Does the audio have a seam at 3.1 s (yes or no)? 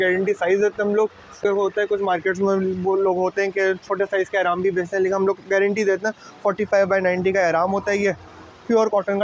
no